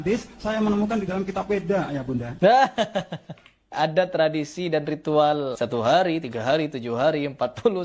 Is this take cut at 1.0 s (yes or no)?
no